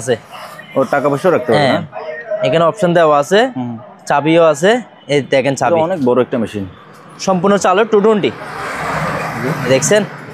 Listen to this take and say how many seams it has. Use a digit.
0